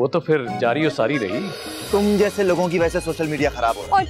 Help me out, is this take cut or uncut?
cut